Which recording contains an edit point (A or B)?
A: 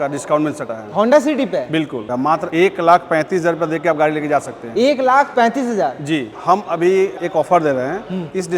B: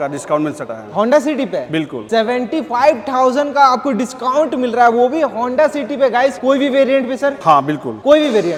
A